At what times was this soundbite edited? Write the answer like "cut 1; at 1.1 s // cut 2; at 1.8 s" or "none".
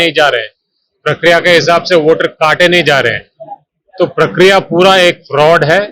none